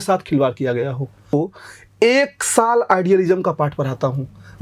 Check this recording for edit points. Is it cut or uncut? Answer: cut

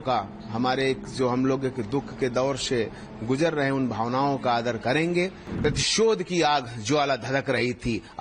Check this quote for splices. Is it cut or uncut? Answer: cut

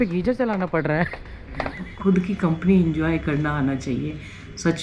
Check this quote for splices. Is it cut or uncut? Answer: cut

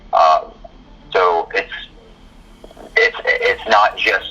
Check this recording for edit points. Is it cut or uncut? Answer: uncut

